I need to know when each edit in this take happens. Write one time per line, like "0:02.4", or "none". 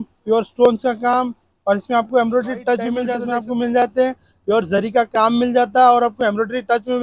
0:03.1